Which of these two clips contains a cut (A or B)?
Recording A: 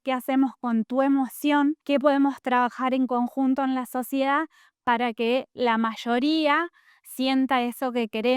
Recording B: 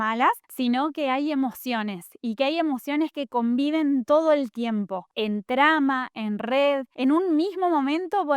B